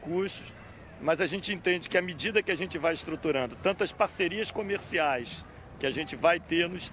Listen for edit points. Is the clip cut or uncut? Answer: cut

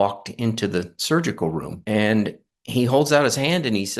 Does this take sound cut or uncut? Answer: cut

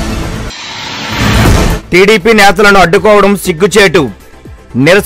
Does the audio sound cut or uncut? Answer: cut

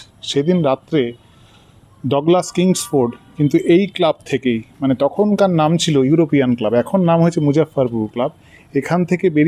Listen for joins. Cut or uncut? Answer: uncut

